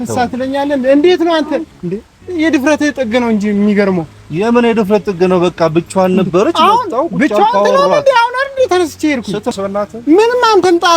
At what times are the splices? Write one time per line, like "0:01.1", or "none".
0:09.5

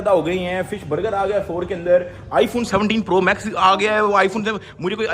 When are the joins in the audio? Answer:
none

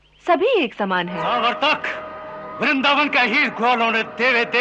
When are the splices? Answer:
0:01.2

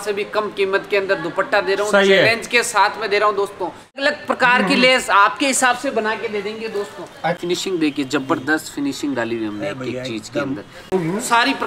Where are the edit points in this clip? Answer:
0:04.0
0:07.4
0:10.9

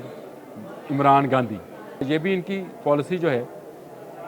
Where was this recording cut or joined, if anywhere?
0:02.1

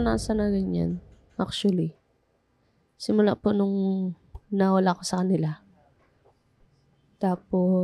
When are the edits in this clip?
none

